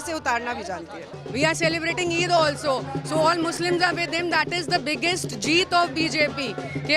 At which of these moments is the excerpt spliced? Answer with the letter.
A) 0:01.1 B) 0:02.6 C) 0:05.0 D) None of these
A